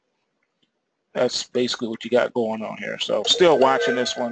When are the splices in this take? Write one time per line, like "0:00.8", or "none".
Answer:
0:02.5